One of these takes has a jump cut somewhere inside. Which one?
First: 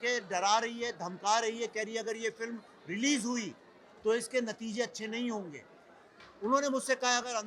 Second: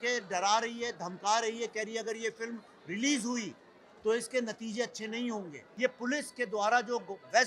second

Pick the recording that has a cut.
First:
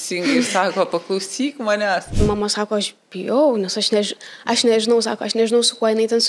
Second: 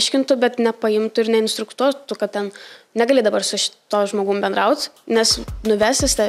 first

